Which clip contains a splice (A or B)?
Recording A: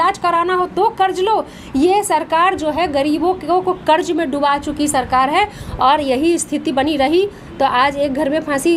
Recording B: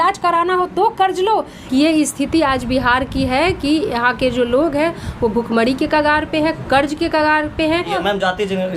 B